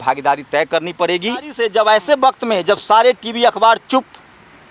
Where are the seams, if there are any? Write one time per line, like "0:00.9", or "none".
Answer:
0:01.5